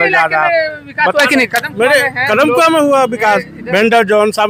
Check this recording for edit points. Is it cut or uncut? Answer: uncut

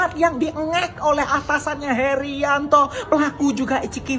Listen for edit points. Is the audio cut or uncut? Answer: uncut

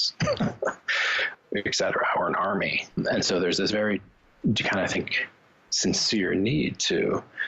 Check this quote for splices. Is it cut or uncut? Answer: cut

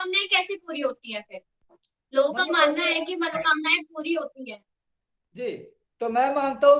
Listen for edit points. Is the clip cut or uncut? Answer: uncut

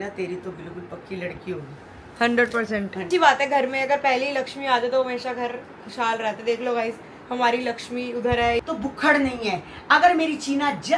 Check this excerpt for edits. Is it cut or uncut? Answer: cut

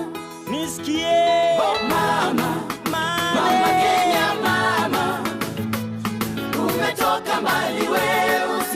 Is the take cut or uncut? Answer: uncut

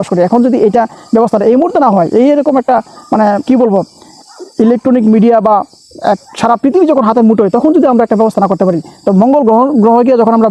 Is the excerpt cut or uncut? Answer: uncut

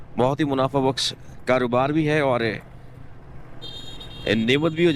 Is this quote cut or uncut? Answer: uncut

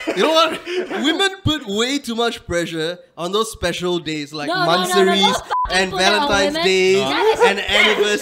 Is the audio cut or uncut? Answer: uncut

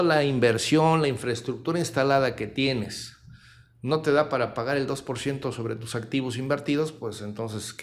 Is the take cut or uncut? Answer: uncut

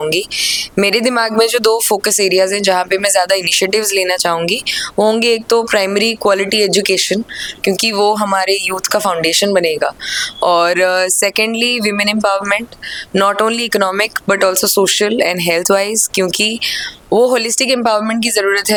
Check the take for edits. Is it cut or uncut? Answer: uncut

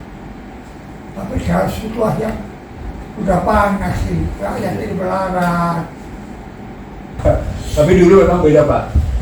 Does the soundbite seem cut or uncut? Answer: cut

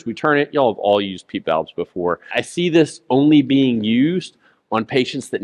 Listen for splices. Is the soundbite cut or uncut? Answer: cut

